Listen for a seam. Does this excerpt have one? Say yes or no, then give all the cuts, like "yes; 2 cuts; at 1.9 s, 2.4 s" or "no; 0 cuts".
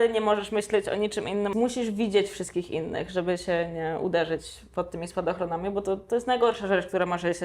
yes; 1 cut; at 1.5 s